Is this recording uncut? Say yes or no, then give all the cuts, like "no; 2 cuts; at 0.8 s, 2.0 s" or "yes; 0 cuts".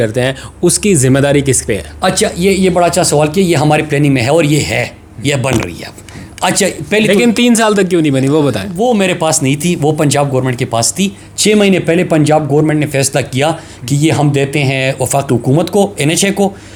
yes; 0 cuts